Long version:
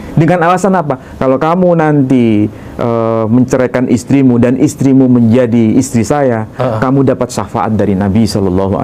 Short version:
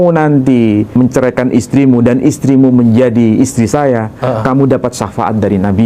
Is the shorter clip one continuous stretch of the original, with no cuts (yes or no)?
no